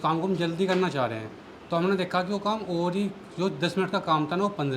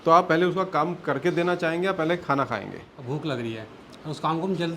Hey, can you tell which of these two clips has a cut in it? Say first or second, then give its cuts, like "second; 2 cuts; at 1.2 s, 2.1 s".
second; 1 cut; at 2.9 s